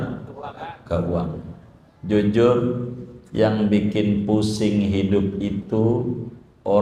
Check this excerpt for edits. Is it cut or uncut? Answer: uncut